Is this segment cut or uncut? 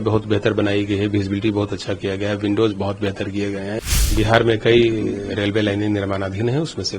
cut